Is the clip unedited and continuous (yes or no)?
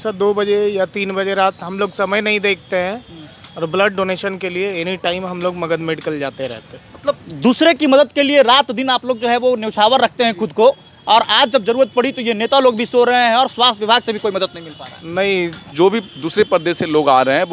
no